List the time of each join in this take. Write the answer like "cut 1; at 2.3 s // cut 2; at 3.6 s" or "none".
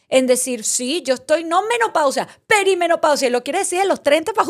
none